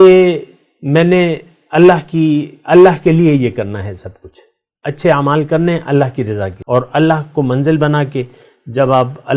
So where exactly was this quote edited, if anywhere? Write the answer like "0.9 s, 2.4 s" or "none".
6.5 s